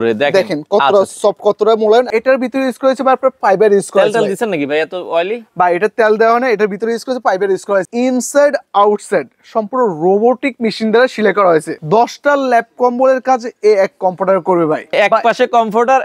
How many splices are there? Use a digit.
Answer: 4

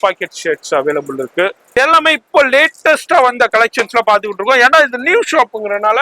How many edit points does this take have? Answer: 1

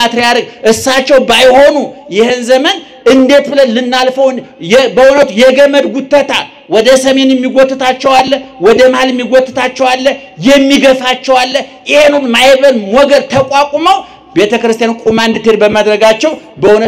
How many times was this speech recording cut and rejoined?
0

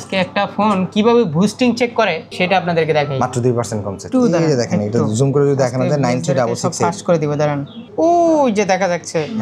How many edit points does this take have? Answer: 3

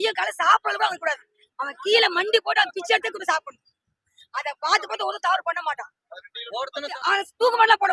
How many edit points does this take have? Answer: 1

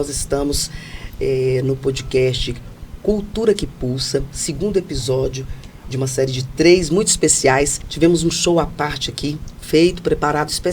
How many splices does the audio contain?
1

